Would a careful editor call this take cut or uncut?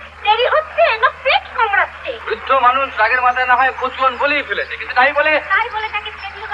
cut